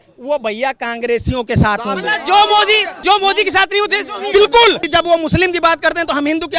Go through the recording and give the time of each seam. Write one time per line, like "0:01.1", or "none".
0:03.0
0:04.8